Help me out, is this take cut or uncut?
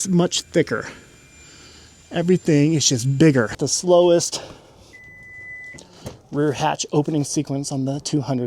cut